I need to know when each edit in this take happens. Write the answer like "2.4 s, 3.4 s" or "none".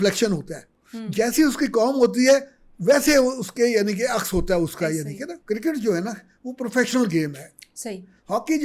5.3 s